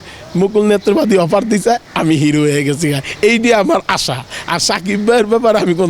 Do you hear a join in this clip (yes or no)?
no